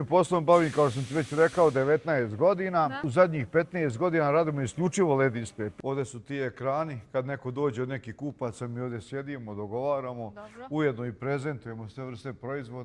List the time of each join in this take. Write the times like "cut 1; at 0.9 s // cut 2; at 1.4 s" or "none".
cut 1; at 3.0 s // cut 2; at 5.6 s